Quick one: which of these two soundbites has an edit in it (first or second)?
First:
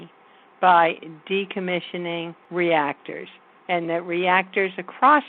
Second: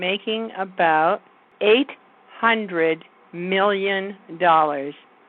first